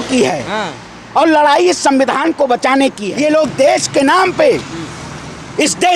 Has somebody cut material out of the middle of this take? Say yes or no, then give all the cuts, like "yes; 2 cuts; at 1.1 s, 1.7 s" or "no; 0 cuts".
yes; 1 cut; at 3.1 s